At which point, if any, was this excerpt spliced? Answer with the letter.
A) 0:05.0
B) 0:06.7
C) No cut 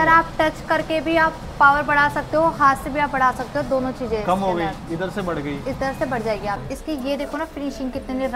B